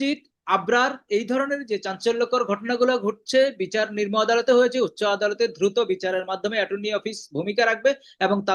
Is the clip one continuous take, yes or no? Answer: yes